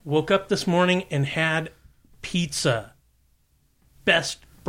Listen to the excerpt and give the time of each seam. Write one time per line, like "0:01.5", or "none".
none